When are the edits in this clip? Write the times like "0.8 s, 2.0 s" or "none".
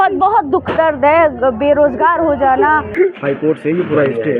2.9 s